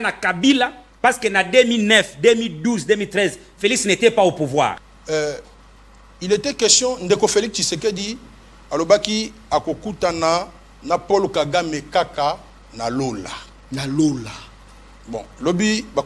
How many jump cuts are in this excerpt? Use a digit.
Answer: 1